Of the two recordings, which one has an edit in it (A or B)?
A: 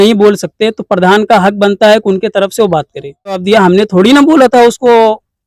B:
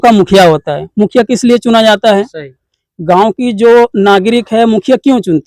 A